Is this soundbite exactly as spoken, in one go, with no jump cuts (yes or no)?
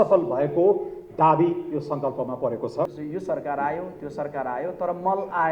no